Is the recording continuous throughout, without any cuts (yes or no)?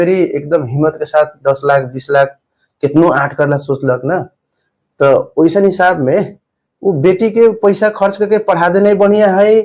yes